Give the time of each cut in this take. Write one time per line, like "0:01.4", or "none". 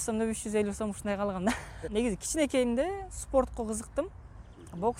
0:01.7